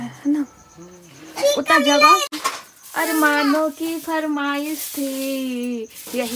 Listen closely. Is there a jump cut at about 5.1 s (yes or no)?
no